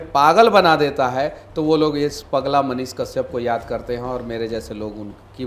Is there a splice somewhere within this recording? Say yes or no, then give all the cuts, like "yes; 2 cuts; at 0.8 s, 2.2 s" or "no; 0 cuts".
no; 0 cuts